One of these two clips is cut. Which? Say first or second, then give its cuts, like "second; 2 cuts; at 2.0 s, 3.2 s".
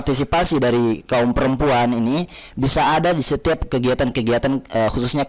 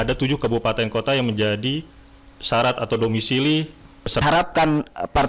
second; 1 cut; at 4.2 s